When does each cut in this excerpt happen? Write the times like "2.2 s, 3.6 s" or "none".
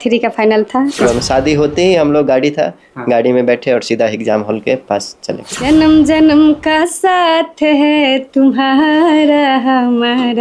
1.1 s, 5.4 s